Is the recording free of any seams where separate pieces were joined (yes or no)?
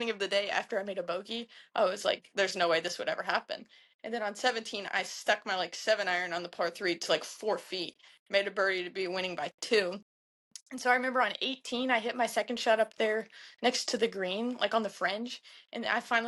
yes